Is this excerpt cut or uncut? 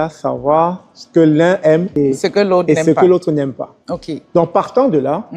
uncut